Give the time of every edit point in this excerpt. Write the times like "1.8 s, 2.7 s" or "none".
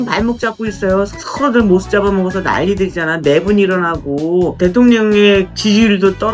1.2 s, 4.5 s, 5.5 s